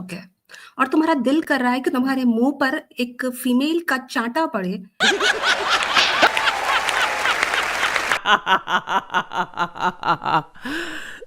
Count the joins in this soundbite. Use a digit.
1